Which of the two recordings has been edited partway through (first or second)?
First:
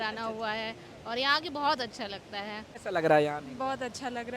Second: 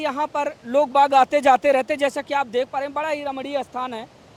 first